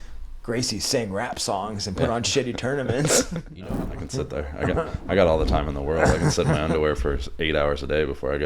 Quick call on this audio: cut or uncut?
cut